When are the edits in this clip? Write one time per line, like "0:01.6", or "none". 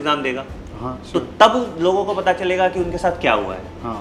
none